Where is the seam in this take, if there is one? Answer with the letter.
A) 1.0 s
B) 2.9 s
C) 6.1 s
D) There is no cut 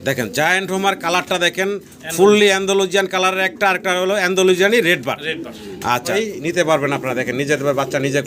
C